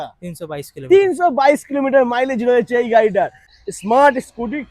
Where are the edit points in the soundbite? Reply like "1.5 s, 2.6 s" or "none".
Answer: 3.4 s